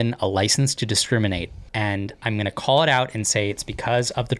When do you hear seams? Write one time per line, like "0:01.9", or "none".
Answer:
0:01.6